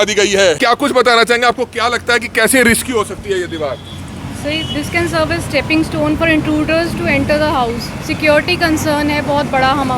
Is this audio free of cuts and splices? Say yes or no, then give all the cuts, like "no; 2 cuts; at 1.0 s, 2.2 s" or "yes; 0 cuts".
no; 1 cut; at 1.2 s